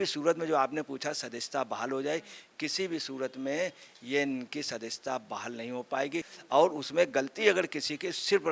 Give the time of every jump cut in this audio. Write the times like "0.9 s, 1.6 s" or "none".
6.3 s